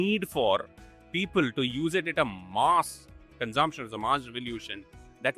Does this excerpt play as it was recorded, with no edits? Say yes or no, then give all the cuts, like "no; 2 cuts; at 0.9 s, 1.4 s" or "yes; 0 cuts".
yes; 0 cuts